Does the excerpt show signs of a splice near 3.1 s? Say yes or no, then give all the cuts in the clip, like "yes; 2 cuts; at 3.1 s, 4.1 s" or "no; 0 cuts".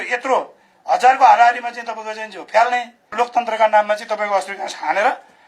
yes; 1 cut; at 3.1 s